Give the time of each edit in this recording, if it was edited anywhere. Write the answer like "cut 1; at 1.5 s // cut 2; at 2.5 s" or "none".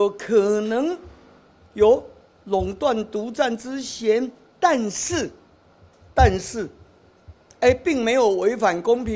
none